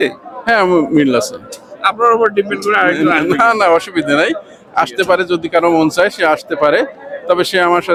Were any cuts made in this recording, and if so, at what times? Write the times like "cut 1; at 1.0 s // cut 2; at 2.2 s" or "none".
none